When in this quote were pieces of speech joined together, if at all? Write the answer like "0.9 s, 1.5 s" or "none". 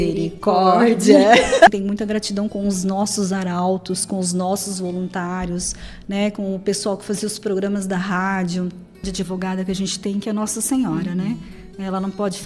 1.7 s, 9.1 s